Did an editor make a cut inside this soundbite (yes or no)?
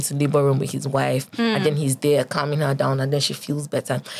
no